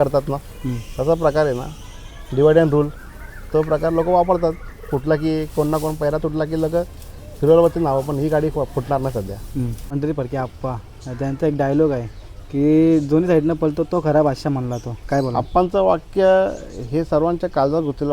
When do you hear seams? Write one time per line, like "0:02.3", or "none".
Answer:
0:09.8